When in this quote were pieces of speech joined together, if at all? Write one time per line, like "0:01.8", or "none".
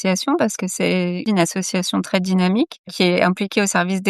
0:01.2